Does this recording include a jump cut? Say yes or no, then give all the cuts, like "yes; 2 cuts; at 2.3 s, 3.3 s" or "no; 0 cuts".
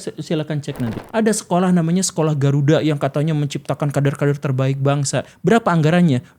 yes; 1 cut; at 0.9 s